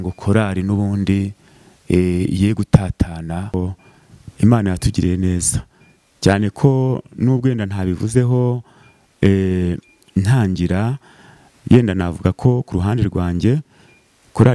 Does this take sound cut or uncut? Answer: cut